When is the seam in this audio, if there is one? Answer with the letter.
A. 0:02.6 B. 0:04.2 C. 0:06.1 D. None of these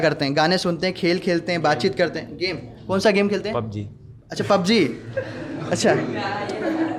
D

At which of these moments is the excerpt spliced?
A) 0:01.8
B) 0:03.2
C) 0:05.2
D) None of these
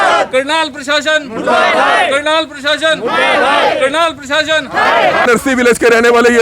C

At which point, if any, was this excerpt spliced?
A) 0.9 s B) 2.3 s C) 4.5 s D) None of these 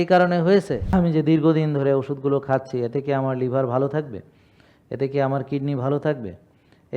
A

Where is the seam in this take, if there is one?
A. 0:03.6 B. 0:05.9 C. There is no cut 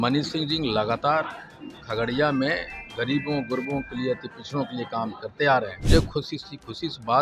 B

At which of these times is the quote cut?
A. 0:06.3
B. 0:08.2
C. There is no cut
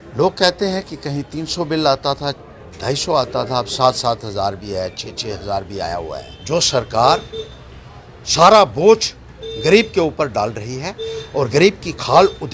A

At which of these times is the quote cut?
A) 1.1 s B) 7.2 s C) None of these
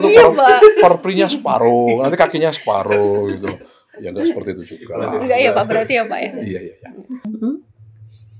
B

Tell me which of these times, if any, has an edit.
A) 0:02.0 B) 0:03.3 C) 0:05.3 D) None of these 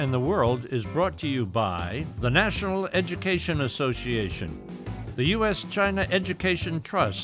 A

